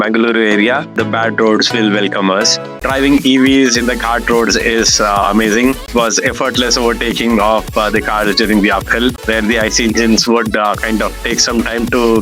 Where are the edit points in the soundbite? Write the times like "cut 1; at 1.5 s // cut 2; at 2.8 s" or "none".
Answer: cut 1; at 0.9 s // cut 2; at 2.8 s // cut 3; at 5.9 s // cut 4; at 9.2 s